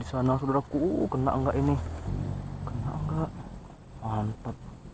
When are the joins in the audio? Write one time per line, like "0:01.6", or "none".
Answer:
0:02.1